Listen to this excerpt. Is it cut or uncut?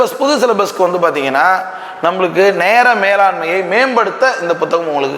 uncut